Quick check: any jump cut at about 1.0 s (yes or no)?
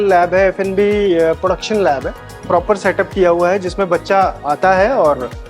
no